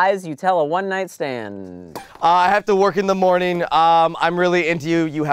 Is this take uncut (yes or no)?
yes